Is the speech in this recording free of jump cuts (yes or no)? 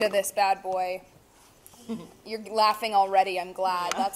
yes